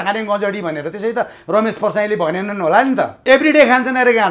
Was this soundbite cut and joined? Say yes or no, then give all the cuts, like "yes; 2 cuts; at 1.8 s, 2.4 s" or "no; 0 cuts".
yes; 1 cut; at 3.2 s